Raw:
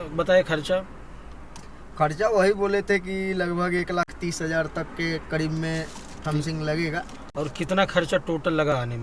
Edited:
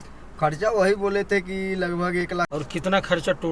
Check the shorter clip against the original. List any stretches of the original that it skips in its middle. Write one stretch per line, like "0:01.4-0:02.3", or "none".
0:04.1-0:07.4